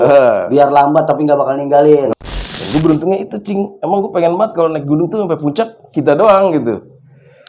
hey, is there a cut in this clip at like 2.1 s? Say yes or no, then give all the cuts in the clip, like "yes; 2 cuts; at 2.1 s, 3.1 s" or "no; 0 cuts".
yes; 1 cut; at 2.1 s